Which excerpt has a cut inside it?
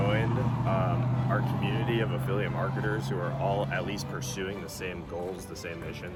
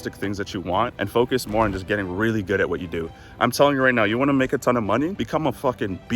second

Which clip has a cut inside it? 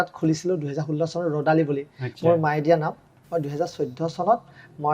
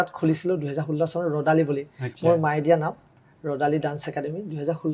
first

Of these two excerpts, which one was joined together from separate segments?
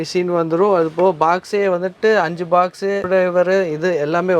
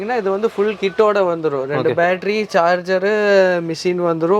first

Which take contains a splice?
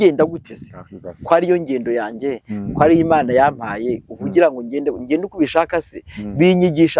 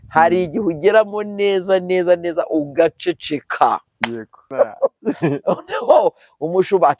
second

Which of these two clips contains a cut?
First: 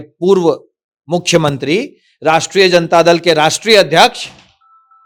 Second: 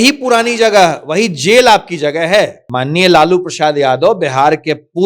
second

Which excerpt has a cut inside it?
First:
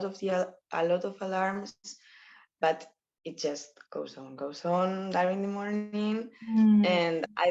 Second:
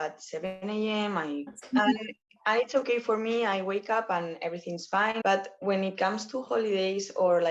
second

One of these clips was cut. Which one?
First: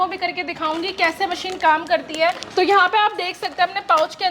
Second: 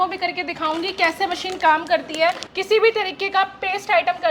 second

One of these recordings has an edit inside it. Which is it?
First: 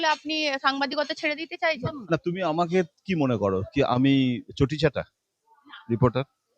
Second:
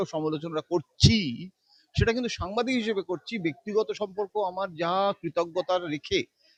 first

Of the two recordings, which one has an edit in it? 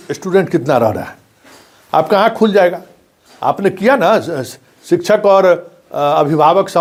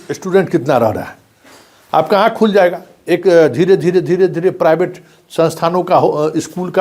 second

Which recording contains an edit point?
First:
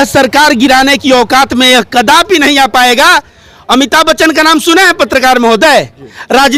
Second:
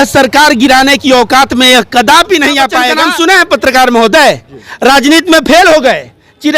second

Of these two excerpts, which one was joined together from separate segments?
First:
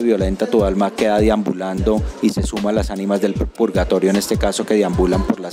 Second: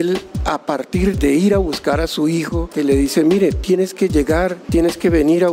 second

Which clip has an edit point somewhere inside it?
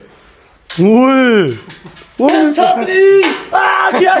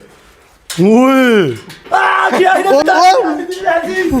second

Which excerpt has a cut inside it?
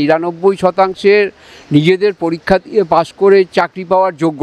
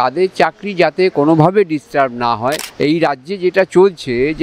second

